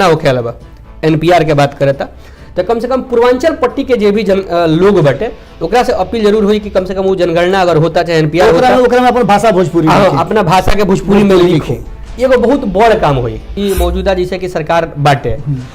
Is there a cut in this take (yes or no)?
yes